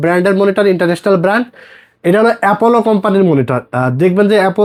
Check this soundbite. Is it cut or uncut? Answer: uncut